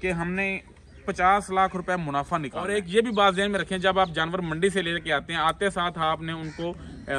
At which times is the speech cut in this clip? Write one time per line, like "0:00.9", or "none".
0:02.6